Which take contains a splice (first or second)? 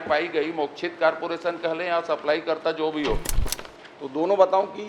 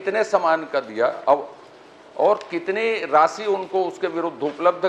first